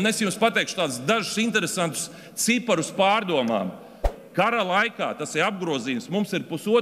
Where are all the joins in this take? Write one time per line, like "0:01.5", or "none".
0:04.1